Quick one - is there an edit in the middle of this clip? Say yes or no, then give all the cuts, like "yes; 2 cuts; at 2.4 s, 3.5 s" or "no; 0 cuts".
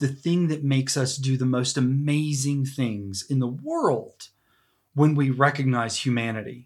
no; 0 cuts